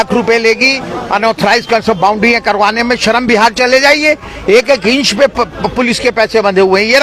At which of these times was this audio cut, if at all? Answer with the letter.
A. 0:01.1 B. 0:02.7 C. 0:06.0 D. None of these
D